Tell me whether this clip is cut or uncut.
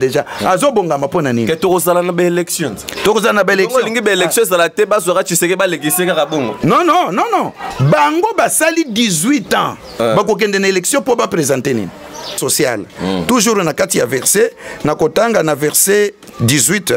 cut